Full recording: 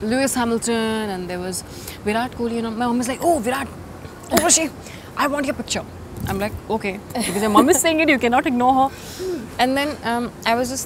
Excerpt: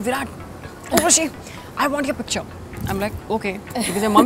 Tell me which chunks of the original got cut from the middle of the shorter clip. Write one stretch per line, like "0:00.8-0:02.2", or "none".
none